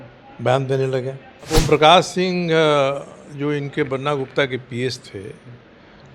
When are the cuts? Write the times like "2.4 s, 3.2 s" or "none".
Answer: 1.5 s